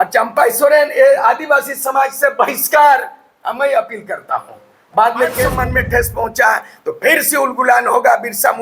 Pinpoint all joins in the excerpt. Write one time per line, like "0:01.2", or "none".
0:05.6